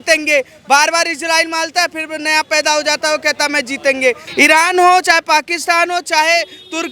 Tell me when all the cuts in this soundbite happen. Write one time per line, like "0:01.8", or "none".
0:04.2